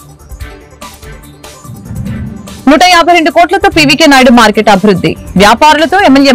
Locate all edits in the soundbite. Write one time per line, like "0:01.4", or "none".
0:02.4

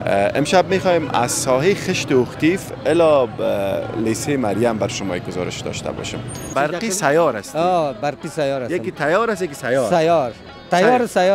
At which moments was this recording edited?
0:06.5

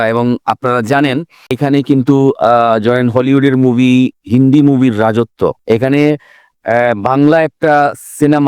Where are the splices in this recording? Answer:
0:01.6

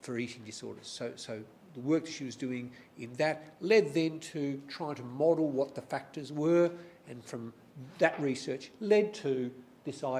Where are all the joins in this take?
0:04.7

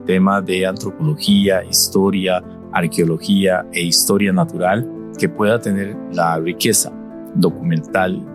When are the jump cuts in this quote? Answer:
0:05.1

